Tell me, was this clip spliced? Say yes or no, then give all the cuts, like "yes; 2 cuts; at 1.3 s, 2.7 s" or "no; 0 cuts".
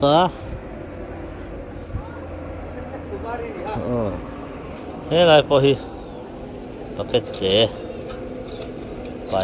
no; 0 cuts